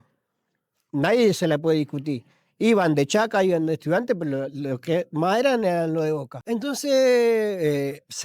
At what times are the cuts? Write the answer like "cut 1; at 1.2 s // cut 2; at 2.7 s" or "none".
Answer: cut 1; at 6.3 s